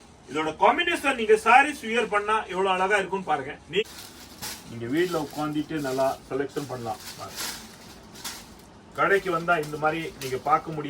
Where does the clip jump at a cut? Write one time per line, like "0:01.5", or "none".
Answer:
0:03.8